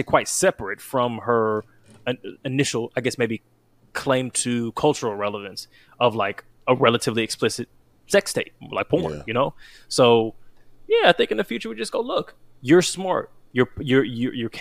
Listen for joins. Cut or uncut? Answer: uncut